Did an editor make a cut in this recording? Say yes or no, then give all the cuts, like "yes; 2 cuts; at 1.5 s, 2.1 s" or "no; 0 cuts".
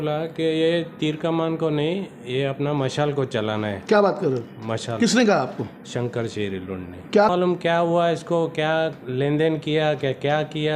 yes; 2 cuts; at 4.7 s, 7.3 s